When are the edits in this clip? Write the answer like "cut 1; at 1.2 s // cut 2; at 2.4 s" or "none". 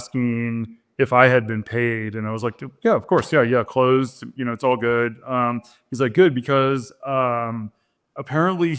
none